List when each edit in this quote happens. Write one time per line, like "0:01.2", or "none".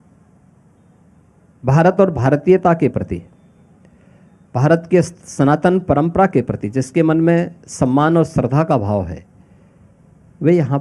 none